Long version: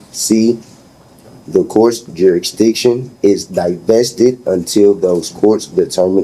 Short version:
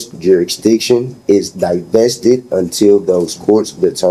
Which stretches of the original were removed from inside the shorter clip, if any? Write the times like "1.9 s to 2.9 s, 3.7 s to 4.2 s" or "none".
none